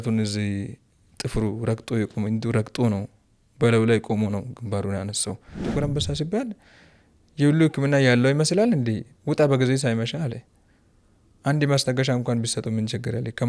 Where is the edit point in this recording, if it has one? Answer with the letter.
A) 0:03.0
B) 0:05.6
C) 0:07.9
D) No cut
B